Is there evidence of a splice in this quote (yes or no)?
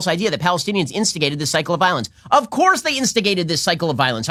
no